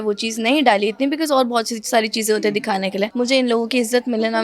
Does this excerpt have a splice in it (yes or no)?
yes